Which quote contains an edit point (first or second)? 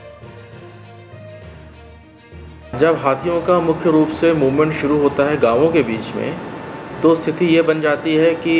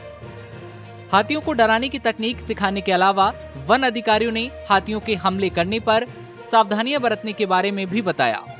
first